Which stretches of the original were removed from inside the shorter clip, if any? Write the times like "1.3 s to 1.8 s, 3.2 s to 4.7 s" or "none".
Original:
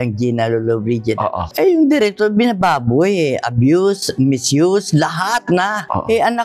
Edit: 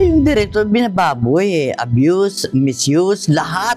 none